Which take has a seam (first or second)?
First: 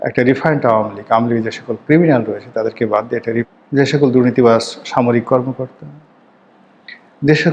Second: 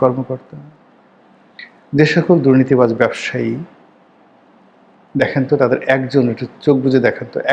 first